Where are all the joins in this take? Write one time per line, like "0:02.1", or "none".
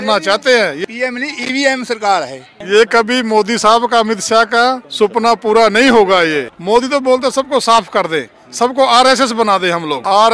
none